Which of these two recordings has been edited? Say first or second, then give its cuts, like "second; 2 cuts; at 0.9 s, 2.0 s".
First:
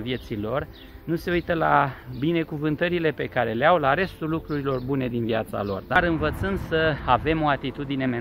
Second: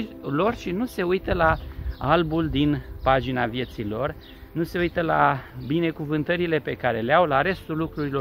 first; 1 cut; at 5.9 s